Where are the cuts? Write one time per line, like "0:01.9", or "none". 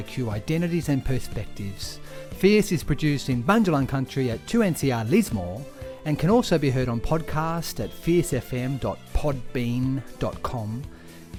none